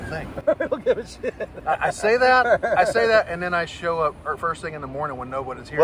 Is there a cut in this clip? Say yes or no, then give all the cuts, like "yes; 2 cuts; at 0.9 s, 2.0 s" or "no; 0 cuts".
no; 0 cuts